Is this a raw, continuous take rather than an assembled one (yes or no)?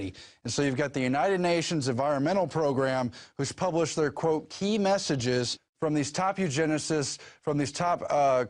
no